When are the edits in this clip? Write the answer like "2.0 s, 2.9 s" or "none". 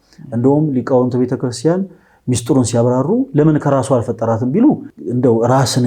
4.9 s